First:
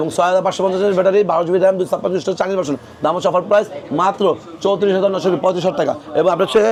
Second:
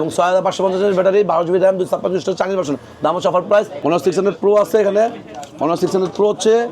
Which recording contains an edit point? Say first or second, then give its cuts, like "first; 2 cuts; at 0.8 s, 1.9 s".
second; 1 cut; at 3.7 s